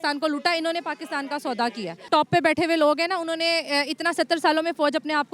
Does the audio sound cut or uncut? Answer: cut